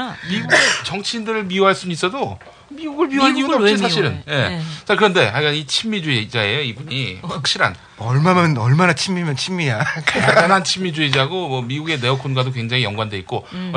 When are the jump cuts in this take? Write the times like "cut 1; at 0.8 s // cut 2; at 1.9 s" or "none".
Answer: cut 1; at 7.4 s